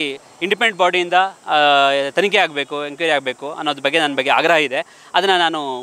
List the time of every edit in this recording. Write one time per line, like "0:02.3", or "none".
none